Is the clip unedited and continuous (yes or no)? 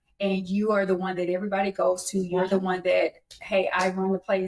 yes